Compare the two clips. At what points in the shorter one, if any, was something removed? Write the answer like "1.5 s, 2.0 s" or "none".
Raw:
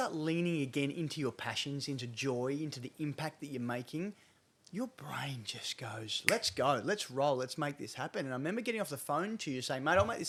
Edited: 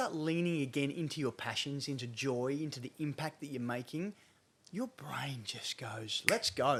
none